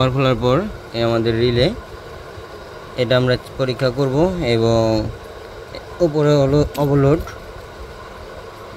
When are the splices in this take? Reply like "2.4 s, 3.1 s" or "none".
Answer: none